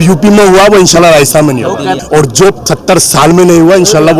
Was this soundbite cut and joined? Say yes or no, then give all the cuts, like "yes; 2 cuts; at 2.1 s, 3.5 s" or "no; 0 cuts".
yes; 1 cut; at 2.0 s